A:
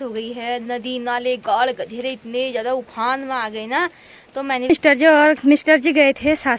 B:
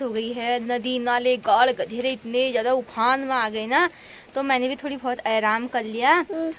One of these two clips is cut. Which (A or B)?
A